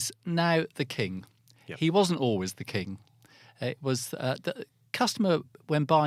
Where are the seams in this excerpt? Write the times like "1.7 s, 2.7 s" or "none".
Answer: none